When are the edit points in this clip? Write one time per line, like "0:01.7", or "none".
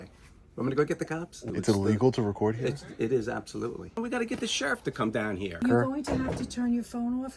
0:01.4
0:04.0
0:05.6